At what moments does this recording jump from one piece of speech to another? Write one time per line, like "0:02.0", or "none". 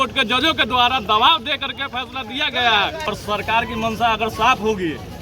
0:03.1